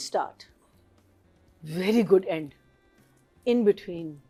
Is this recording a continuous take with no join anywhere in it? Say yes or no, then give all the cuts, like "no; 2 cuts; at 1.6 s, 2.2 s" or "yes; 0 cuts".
yes; 0 cuts